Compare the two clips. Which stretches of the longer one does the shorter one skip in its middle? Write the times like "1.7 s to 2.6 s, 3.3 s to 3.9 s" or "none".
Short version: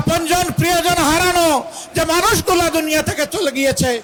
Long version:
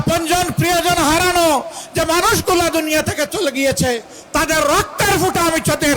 none

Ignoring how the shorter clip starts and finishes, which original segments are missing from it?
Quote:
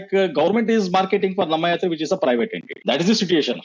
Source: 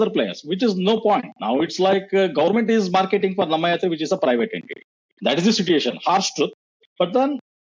4.7 s to 5.0 s

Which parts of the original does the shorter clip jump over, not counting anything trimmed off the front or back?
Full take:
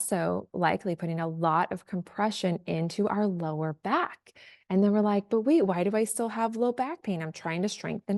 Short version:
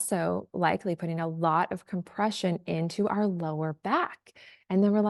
none

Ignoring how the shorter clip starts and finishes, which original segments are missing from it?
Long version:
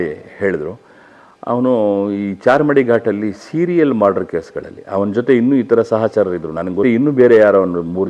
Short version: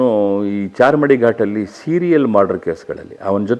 none

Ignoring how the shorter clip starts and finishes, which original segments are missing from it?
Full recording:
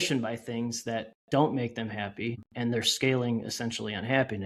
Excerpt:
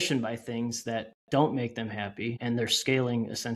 2.3 s to 2.5 s

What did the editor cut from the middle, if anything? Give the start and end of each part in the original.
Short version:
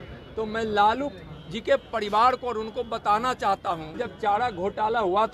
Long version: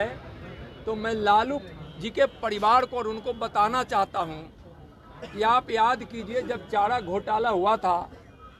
4.6 s to 6.6 s

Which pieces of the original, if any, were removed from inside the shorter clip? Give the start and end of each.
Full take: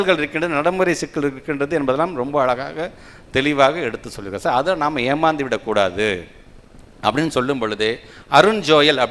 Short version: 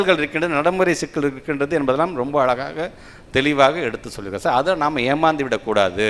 none

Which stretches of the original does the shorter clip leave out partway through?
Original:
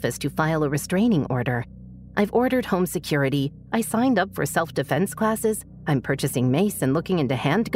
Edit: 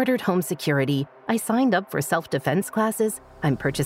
none

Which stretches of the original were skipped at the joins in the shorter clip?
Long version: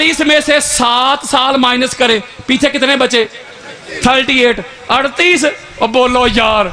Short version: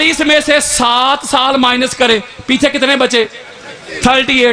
none

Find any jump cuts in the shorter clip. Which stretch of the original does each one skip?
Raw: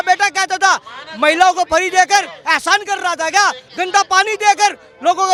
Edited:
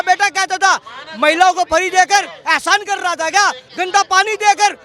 none

